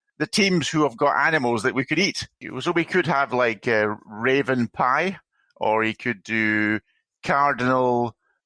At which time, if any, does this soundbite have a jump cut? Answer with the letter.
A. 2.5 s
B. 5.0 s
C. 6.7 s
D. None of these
A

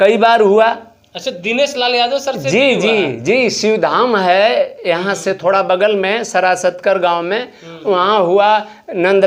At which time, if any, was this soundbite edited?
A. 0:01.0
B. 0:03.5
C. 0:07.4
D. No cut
D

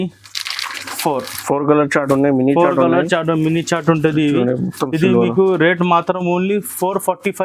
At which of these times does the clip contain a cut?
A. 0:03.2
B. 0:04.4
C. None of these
C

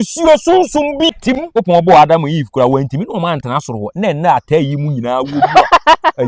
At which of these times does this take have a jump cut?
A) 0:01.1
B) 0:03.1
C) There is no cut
A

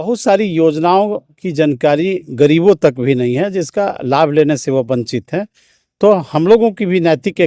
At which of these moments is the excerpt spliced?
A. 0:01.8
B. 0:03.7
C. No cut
C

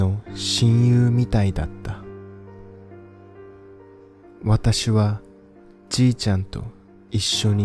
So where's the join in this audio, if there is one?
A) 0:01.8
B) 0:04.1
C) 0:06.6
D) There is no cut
D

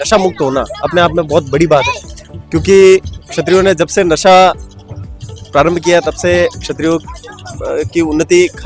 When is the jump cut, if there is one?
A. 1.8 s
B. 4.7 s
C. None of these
C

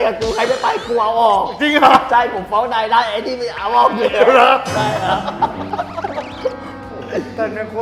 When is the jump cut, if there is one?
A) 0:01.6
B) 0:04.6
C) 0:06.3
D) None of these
D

